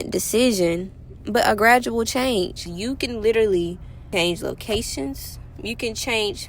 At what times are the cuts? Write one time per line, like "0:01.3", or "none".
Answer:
0:02.7
0:03.9